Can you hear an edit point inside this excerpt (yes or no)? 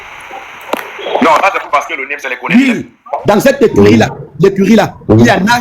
yes